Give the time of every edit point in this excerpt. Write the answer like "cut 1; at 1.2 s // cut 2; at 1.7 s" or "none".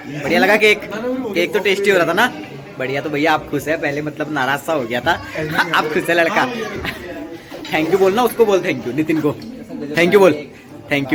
none